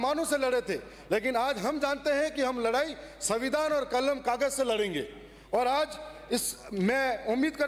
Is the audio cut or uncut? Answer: uncut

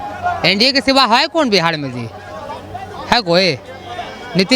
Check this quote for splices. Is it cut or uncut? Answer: uncut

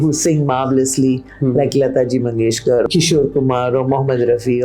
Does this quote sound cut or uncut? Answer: cut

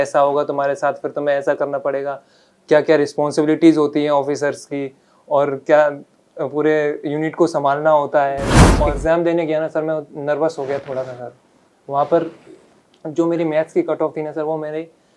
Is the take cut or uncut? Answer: cut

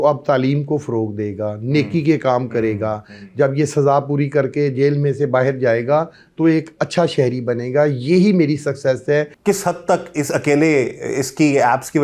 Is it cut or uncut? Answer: cut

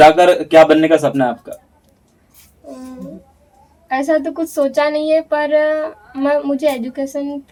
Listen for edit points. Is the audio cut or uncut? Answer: uncut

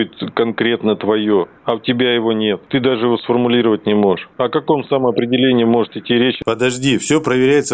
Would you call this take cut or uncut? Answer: cut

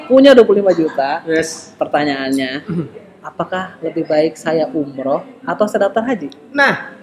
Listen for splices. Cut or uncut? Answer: uncut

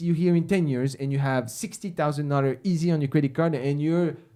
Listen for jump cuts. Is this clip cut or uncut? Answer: uncut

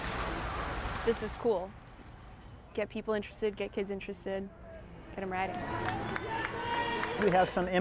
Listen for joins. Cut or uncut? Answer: uncut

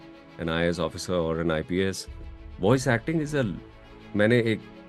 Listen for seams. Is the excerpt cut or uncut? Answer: cut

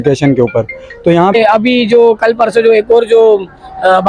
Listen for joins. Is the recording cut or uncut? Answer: cut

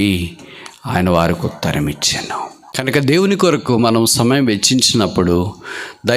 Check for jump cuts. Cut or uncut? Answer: cut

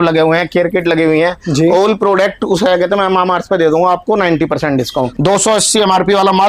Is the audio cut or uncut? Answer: cut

